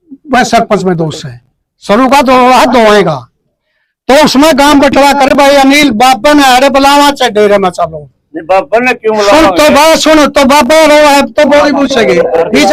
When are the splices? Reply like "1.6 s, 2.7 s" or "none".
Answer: none